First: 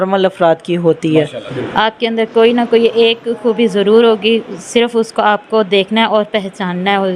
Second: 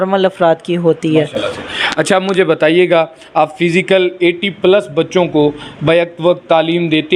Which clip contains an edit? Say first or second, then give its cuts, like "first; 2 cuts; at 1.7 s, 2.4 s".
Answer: first; 1 cut; at 1.4 s